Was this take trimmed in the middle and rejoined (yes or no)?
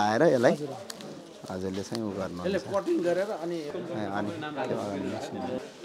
yes